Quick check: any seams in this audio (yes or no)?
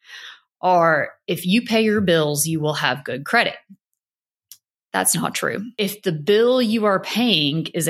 yes